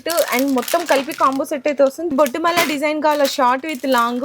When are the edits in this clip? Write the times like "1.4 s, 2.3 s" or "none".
2.1 s